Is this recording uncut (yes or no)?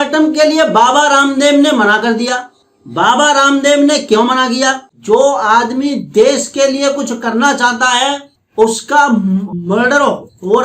no